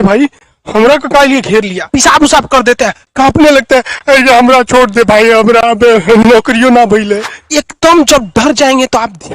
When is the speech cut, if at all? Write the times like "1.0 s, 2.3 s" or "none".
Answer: 1.8 s, 7.4 s